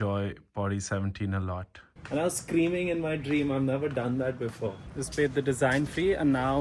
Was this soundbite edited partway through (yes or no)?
yes